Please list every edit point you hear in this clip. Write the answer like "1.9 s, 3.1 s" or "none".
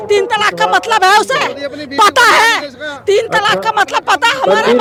none